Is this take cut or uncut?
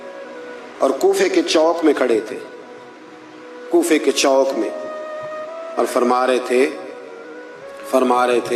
uncut